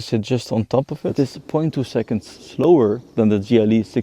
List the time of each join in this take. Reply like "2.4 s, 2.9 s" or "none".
1.1 s, 2.4 s